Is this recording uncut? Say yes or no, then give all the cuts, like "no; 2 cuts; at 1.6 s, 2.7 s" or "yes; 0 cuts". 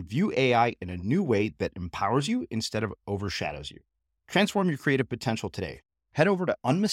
yes; 0 cuts